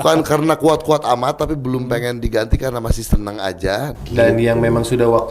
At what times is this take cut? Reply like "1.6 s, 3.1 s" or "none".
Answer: 4.0 s